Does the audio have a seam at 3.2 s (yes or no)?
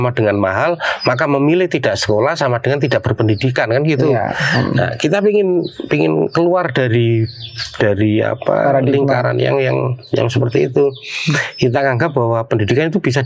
no